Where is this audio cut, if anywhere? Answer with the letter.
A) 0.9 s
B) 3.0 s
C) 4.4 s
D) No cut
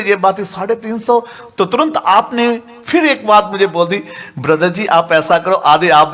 D